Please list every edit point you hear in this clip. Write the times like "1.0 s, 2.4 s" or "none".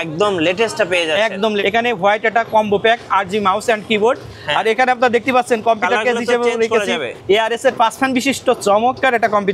1.6 s, 7.1 s